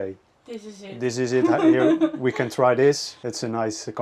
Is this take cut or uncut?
cut